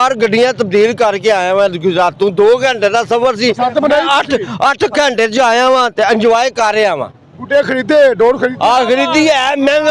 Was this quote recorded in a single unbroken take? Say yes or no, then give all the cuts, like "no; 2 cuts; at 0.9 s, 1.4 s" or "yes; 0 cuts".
yes; 0 cuts